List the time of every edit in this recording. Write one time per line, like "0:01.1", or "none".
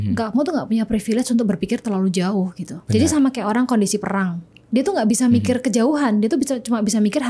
none